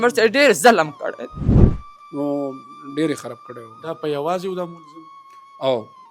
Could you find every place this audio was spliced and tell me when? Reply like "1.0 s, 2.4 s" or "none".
1.7 s

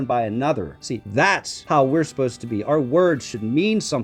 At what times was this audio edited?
1.3 s

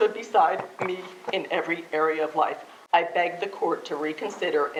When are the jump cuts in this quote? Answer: none

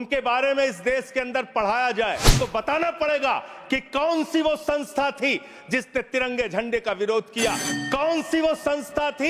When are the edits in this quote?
2.3 s

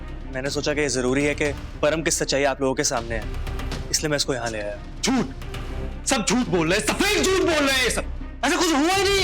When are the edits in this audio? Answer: 4.8 s

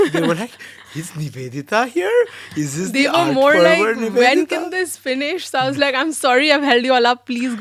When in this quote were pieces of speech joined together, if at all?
none

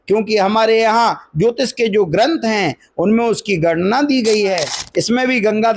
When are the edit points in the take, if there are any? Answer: 4.8 s

